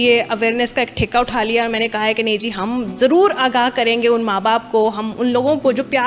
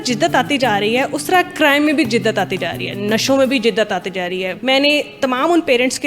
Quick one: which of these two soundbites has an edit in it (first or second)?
second